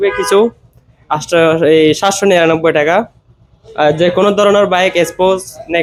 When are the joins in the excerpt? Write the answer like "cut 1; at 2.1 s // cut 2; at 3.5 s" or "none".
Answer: none